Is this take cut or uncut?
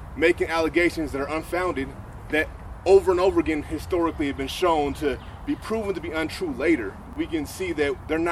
cut